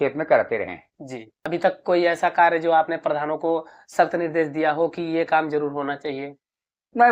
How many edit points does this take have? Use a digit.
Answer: 1